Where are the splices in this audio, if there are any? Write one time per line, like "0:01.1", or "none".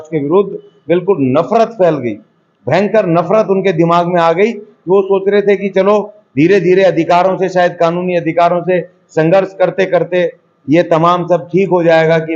none